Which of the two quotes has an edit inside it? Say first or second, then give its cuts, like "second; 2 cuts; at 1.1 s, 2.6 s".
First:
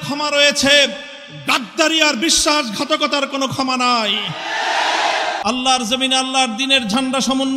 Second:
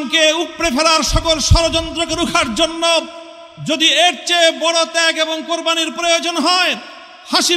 first; 1 cut; at 5.4 s